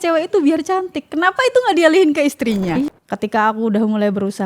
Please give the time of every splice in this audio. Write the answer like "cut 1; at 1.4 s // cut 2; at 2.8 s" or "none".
cut 1; at 2.9 s